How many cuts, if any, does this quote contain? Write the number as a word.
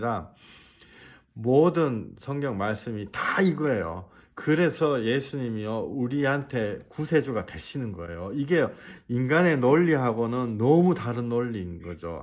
zero